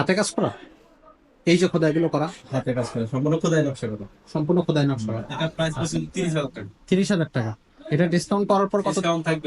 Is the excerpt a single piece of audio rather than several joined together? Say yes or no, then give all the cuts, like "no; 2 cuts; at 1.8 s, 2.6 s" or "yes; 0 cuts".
no; 1 cut; at 5.3 s